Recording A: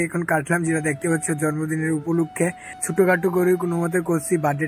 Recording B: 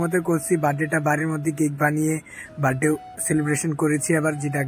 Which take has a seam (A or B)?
A